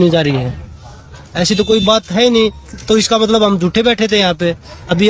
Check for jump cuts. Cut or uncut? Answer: uncut